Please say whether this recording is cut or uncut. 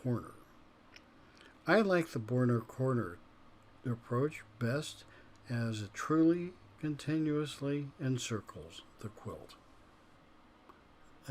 cut